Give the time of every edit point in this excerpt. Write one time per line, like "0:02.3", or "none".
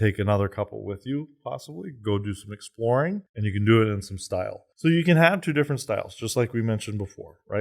0:04.6